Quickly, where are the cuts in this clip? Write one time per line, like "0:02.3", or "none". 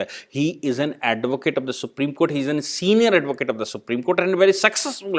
none